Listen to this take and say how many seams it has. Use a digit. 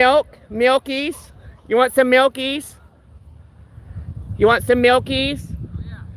0